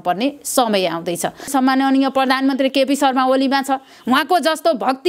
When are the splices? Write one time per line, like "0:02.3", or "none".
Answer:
0:01.5

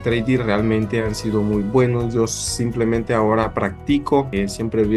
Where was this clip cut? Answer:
none

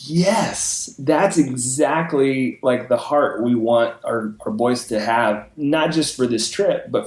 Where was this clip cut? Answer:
none

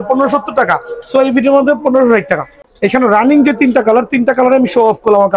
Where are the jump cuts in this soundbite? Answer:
0:02.6

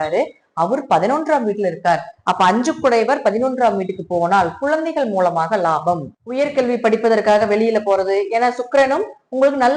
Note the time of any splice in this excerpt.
0:06.2

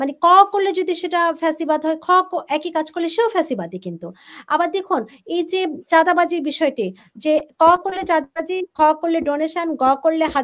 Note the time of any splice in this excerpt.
none

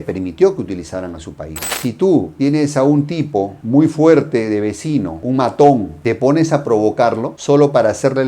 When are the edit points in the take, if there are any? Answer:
0:01.7

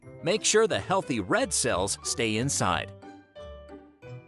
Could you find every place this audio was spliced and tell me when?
0:02.9

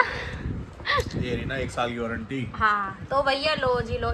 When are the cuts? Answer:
none

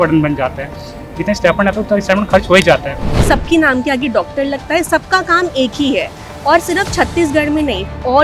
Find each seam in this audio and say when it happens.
0:03.1

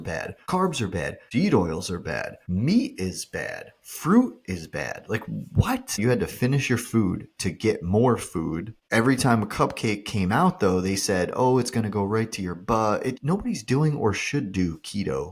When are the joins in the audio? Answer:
0:06.0
0:08.8
0:13.2

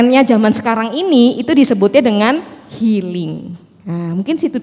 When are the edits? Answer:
none

